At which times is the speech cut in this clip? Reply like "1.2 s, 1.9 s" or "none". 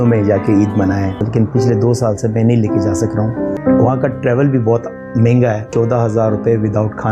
1.2 s, 3.6 s, 5.7 s